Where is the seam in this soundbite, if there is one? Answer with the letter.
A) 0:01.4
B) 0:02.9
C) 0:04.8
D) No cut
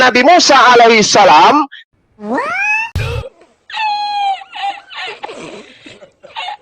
D